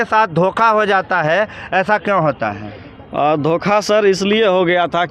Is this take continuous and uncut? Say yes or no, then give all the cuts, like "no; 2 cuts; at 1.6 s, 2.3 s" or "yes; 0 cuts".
yes; 0 cuts